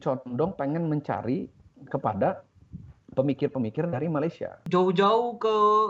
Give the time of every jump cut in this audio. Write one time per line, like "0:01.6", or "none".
0:04.6